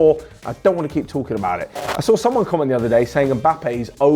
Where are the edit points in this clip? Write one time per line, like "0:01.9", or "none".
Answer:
0:01.7